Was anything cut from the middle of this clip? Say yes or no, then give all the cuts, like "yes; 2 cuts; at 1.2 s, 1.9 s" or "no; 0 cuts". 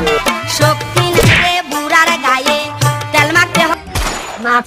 yes; 1 cut; at 3.7 s